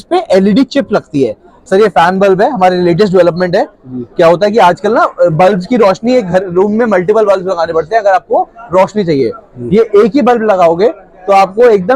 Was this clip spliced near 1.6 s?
yes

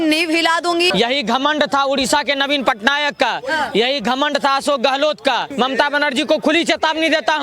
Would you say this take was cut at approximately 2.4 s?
no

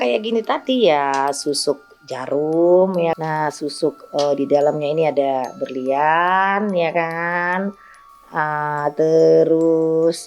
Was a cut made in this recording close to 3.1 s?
yes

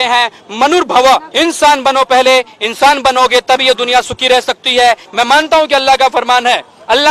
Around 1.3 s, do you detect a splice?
yes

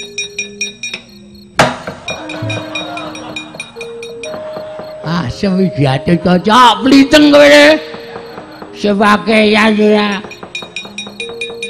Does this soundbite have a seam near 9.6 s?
no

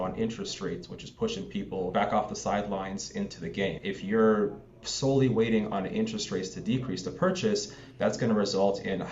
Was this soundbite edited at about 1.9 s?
yes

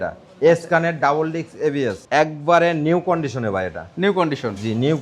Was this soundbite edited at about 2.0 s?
yes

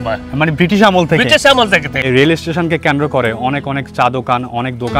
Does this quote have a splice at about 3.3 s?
no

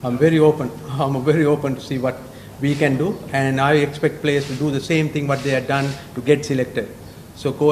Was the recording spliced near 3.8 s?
no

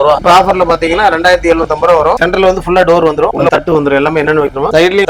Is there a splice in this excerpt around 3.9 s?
no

